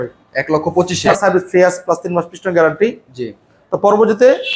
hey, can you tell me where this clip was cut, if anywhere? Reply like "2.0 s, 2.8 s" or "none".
1.1 s